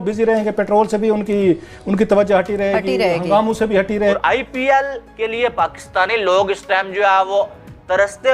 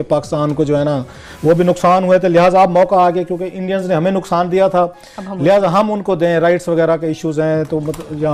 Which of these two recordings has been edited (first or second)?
first